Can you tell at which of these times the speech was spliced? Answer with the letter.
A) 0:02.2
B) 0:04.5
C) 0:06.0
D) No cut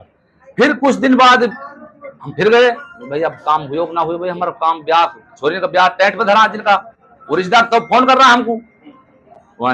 D